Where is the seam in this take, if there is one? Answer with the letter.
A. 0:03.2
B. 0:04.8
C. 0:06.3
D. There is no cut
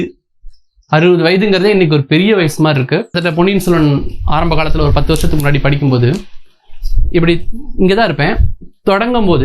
A